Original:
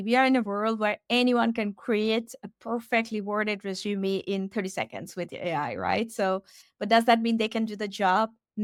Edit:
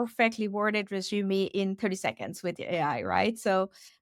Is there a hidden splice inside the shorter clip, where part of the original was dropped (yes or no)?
no